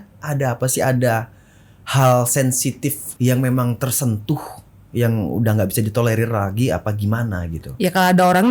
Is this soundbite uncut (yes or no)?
yes